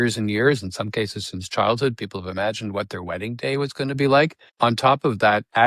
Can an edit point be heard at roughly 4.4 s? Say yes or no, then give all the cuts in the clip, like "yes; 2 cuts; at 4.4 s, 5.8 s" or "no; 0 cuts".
yes; 1 cut; at 4.4 s